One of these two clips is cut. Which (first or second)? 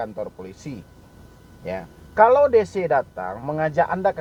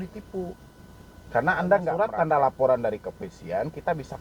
second